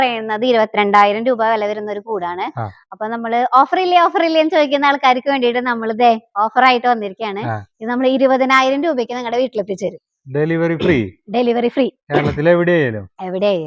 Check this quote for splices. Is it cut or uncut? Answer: uncut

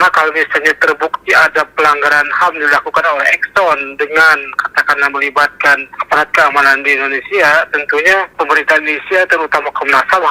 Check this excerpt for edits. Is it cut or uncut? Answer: uncut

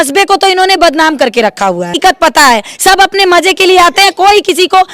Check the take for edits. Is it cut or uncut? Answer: cut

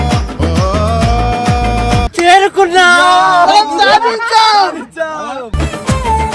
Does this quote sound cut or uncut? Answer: cut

